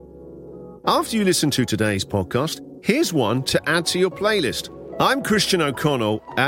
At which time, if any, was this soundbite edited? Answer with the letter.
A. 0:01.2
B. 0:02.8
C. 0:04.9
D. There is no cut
D